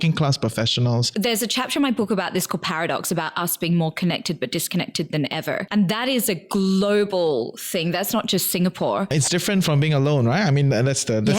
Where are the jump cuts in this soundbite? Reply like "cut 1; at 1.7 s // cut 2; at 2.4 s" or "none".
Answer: cut 1; at 1.1 s // cut 2; at 5.7 s // cut 3; at 9.1 s